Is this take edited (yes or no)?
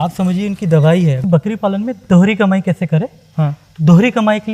yes